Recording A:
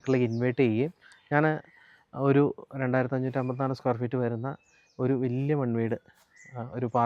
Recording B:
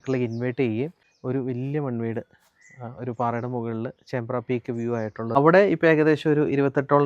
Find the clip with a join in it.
B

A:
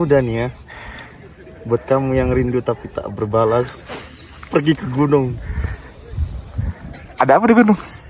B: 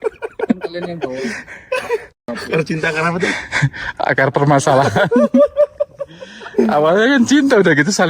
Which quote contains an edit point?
B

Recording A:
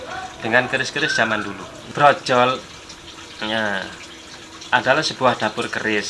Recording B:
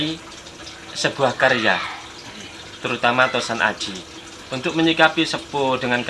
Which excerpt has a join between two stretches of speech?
A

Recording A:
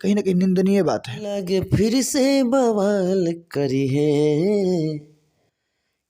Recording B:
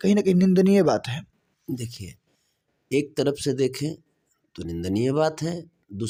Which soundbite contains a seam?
A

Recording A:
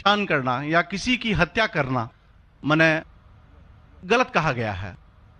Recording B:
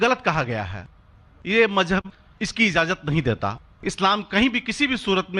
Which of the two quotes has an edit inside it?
B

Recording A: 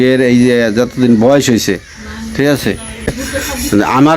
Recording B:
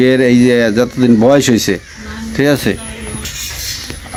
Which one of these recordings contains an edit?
A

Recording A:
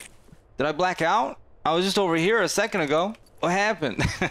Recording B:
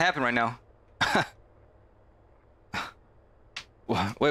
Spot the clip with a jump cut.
A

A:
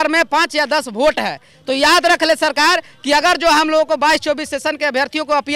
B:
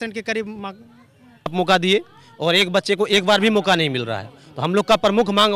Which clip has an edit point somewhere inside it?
B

